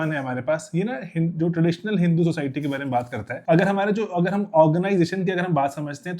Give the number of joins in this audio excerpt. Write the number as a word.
one